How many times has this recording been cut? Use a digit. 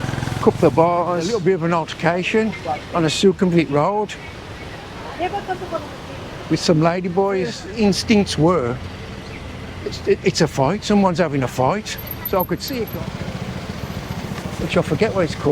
3